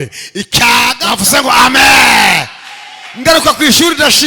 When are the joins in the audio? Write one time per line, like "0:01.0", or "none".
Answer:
0:01.0